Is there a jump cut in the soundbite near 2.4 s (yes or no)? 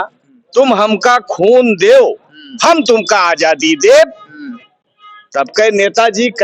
no